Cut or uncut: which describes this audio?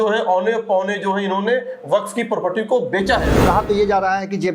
cut